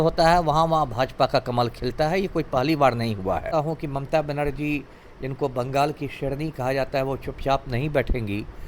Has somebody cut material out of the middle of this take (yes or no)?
yes